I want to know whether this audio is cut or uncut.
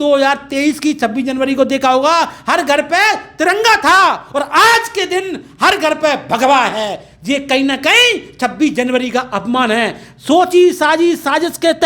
uncut